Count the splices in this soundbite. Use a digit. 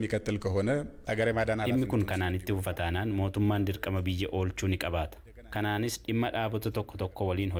0